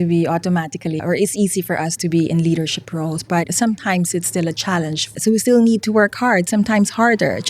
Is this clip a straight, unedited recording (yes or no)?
no